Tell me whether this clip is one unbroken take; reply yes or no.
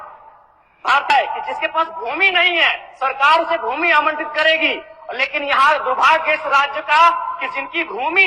no